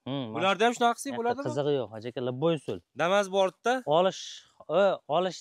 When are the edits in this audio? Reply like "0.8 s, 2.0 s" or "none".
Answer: none

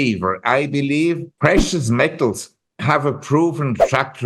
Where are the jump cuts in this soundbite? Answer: 1.3 s

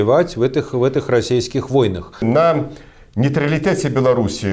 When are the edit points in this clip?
2.2 s

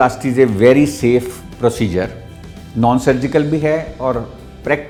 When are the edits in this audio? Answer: none

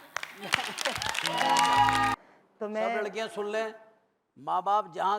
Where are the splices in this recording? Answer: 2.1 s

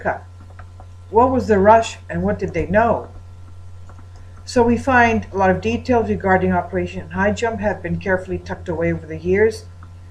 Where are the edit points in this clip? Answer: 8.1 s

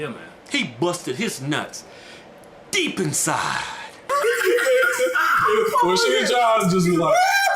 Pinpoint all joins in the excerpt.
4.1 s

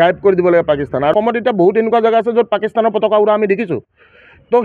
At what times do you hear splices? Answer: 1.1 s

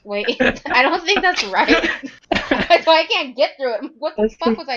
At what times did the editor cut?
2.1 s

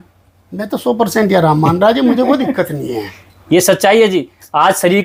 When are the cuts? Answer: none

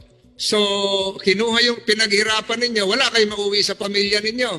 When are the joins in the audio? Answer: none

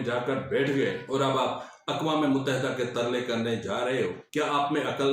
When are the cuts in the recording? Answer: 1.0 s, 4.2 s

